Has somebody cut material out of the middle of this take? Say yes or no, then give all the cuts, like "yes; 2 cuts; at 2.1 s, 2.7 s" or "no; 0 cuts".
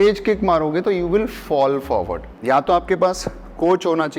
yes; 1 cut; at 2.3 s